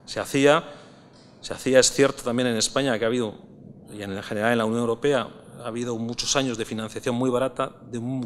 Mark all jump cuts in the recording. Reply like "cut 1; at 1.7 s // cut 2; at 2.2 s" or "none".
cut 1; at 7.3 s